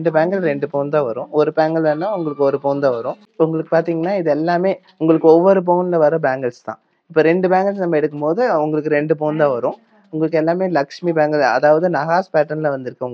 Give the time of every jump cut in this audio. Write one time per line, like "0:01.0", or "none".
none